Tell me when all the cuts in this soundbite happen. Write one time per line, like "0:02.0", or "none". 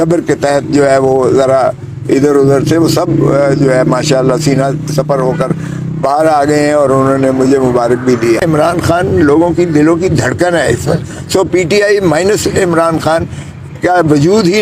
0:08.4